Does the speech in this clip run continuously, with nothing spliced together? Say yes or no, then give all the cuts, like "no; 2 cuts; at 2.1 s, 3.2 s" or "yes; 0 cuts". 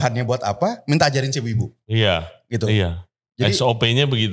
yes; 0 cuts